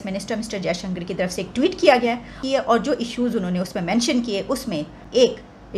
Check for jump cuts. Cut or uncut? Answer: cut